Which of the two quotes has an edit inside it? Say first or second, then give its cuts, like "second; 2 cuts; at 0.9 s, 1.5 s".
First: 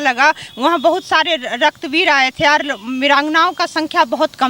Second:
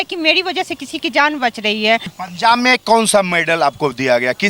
second; 1 cut; at 2.2 s